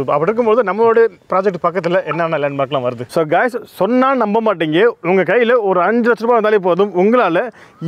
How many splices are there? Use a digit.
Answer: 1